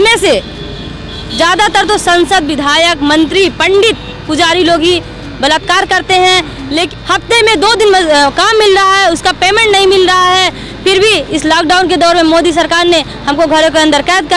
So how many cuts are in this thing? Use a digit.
1